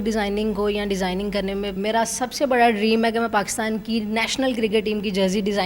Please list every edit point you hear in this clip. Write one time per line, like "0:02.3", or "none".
0:01.7